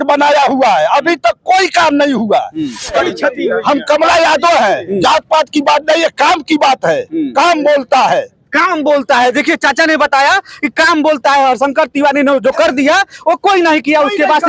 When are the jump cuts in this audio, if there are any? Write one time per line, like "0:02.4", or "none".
0:02.9